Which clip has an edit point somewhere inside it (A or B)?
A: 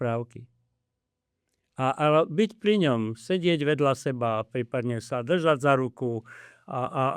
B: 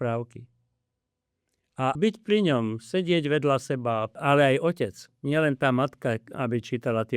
B